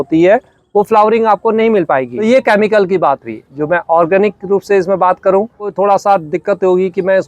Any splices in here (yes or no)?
yes